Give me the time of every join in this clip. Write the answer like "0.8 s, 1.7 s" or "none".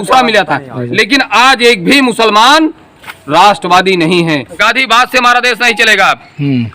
4.6 s

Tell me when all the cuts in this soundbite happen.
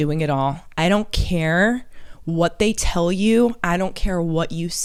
none

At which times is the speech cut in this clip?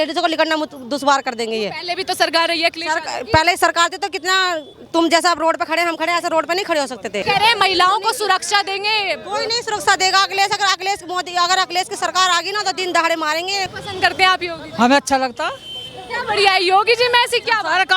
7.2 s, 13.7 s

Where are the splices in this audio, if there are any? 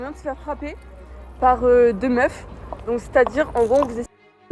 none

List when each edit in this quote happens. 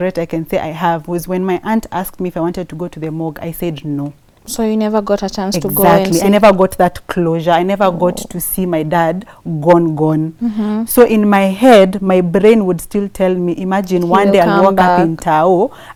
none

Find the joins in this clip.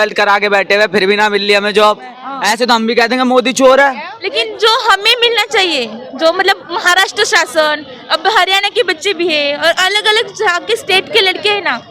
2.3 s, 4.1 s

